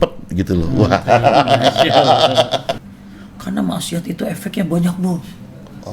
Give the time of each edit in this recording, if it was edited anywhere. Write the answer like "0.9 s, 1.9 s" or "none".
2.7 s